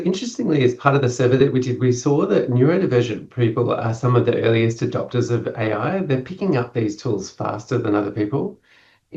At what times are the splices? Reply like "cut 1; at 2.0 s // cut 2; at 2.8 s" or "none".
none